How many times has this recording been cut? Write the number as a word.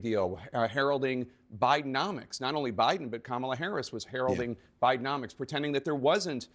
zero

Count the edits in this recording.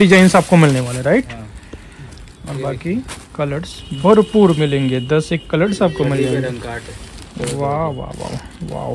zero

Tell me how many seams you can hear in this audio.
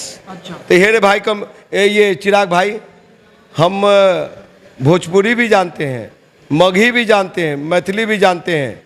zero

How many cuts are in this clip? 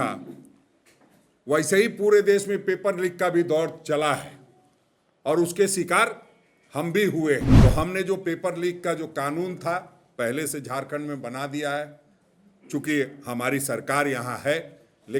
one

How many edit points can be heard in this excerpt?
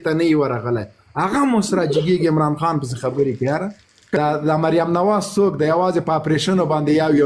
one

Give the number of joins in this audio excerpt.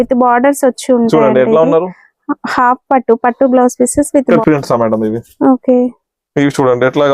one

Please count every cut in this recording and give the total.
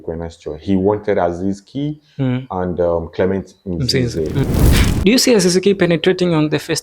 one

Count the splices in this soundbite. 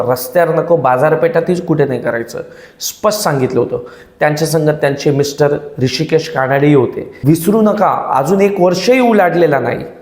one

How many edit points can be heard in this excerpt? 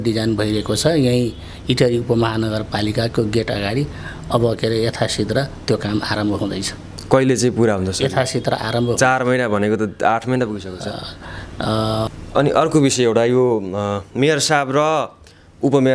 one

